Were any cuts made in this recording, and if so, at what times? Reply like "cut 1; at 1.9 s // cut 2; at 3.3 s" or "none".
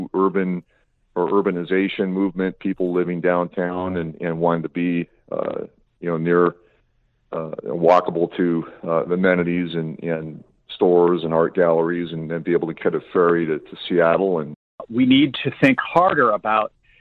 cut 1; at 14.8 s